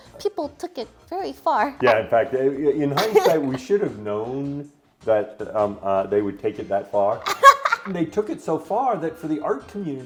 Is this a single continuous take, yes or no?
yes